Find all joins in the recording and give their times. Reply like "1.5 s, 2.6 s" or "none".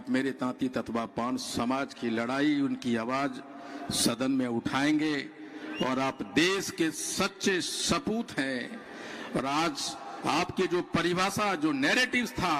none